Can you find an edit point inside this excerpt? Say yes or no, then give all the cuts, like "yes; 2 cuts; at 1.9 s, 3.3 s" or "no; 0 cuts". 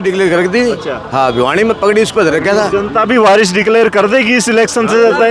no; 0 cuts